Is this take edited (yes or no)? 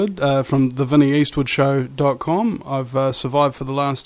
yes